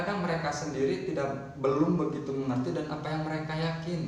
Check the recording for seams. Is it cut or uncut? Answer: uncut